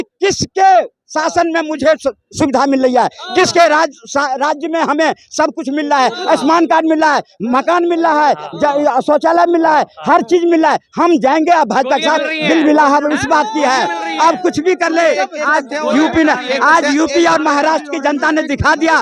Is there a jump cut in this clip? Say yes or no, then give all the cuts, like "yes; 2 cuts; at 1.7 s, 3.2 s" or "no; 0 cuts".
no; 0 cuts